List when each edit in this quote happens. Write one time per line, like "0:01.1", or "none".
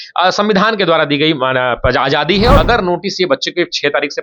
0:02.6